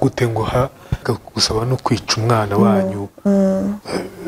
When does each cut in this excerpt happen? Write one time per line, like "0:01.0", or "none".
0:01.2